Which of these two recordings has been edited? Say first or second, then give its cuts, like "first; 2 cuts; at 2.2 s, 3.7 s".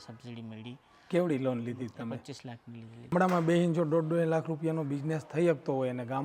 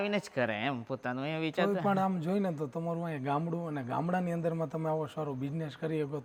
first; 1 cut; at 3.1 s